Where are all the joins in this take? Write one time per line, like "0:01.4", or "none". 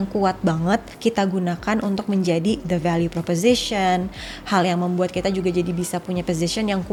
none

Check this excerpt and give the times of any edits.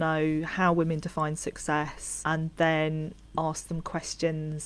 0:02.0
0:03.2

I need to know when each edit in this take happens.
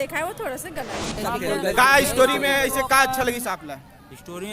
0:01.1

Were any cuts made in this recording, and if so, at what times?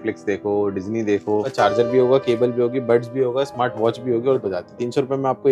0:01.5
0:04.4

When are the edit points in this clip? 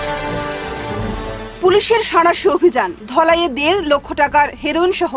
0:01.1

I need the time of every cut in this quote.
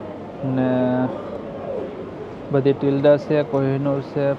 none

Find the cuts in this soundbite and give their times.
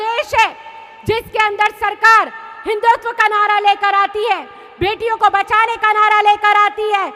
none

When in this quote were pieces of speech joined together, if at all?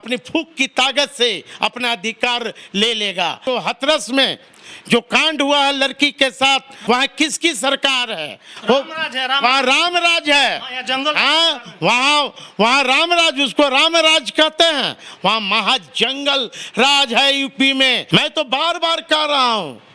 0:03.4
0:06.7
0:18.0

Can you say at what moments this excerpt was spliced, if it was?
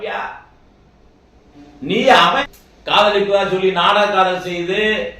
0:02.4

